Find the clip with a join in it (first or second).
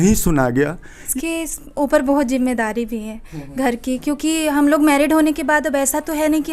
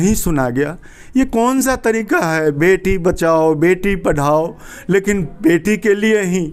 first